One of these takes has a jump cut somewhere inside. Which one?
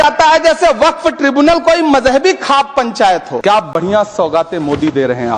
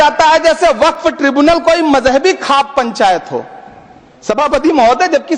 first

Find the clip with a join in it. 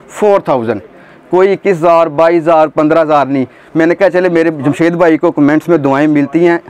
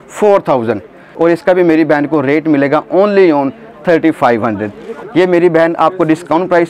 second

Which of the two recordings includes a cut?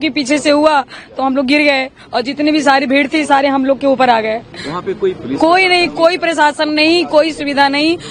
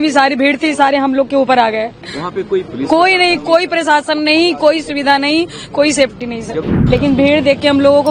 second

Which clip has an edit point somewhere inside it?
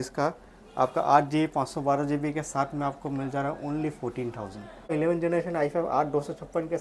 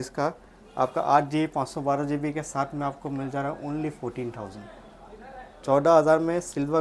first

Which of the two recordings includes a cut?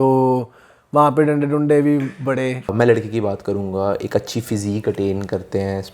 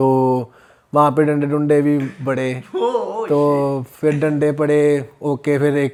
first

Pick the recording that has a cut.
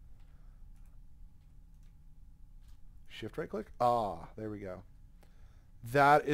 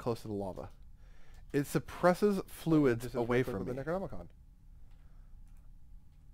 second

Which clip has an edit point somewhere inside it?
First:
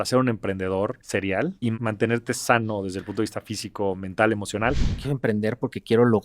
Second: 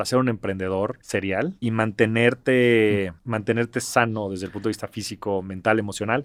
first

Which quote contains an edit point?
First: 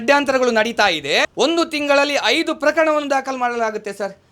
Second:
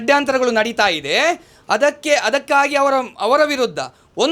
first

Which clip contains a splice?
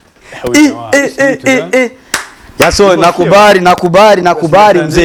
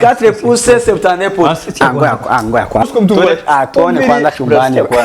second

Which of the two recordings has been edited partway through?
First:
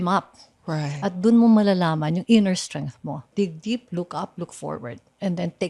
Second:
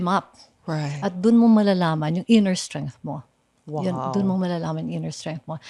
first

